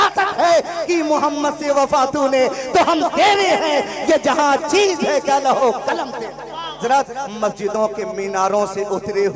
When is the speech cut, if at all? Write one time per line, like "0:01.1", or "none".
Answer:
0:06.8